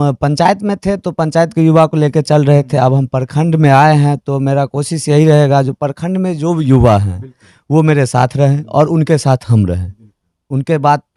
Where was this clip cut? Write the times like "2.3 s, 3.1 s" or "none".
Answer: none

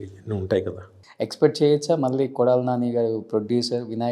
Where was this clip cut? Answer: 1.0 s

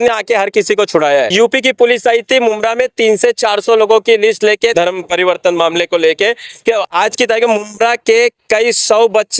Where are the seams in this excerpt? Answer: 1.3 s, 4.7 s

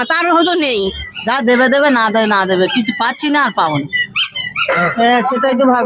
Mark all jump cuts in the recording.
1.0 s, 4.9 s

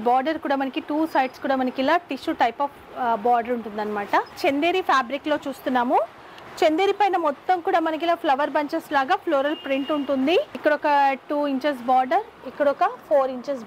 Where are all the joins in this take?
4.3 s, 10.5 s

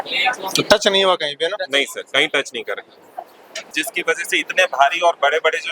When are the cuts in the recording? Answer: 3.8 s

